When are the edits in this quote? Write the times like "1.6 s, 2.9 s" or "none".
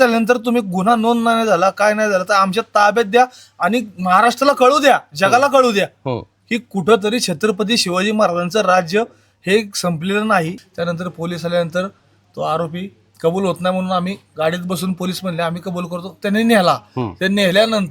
10.6 s